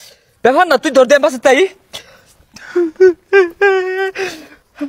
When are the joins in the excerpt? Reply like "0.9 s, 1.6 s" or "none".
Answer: none